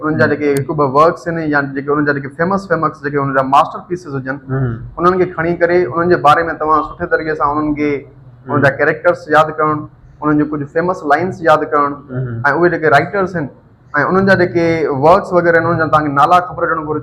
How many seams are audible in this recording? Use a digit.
0